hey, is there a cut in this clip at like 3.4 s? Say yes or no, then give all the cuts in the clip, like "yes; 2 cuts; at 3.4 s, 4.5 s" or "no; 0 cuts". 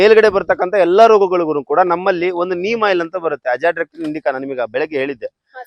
no; 0 cuts